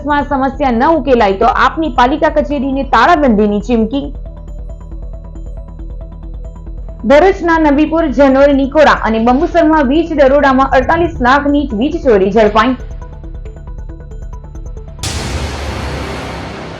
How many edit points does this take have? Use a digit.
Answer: 1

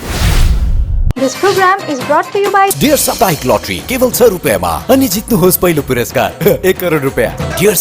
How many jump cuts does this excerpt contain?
1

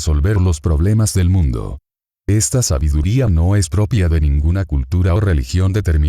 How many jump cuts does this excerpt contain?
1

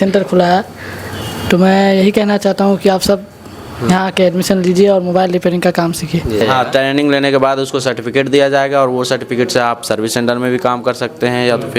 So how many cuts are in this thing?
1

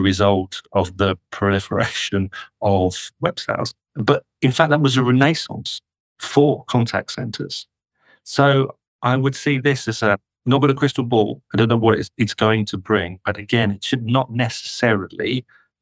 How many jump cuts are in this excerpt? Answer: 1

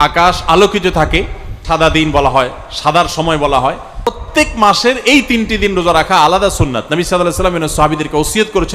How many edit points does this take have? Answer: 2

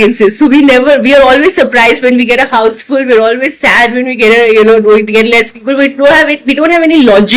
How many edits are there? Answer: 0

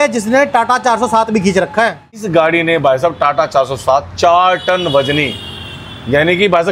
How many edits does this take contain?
1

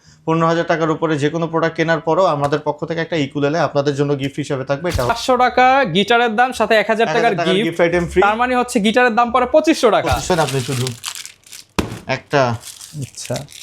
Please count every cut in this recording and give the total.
2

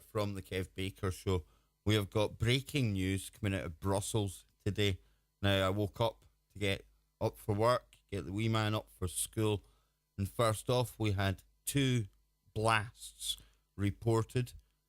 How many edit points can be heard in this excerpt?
1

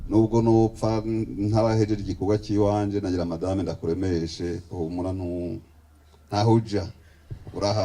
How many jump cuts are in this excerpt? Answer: 0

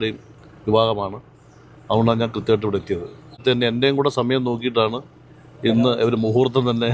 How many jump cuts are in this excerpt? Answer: 1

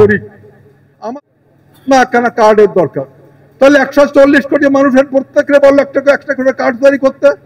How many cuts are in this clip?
1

